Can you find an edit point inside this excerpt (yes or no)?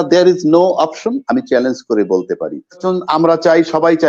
yes